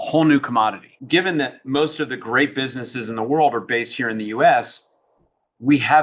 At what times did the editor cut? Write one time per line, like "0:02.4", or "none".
0:00.9